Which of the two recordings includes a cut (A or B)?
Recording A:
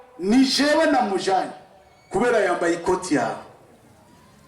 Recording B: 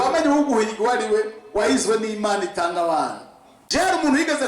B